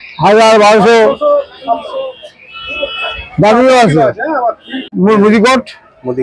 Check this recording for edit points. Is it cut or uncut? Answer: cut